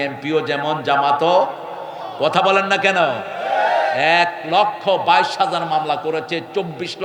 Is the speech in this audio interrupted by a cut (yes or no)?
no